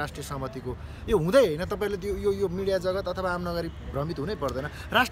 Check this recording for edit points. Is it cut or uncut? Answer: uncut